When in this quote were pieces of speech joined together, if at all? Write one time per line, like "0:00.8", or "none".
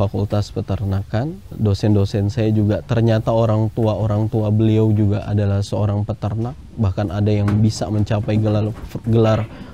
0:01.5